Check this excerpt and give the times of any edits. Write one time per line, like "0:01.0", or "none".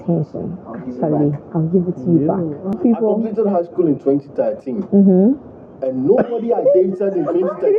0:02.8